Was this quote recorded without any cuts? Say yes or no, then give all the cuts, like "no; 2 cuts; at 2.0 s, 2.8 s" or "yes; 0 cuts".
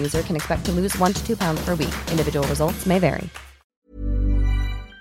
no; 1 cut; at 3.6 s